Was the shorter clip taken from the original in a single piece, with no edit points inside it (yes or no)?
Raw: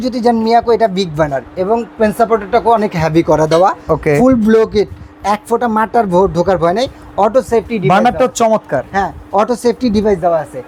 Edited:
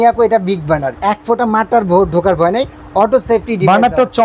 no